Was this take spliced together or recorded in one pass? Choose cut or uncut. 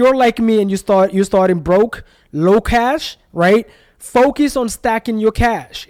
uncut